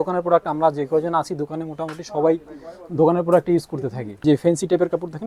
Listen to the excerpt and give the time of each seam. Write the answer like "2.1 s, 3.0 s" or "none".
4.2 s